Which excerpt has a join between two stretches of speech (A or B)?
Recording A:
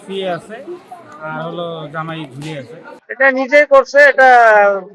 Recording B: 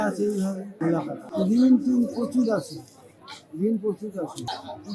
B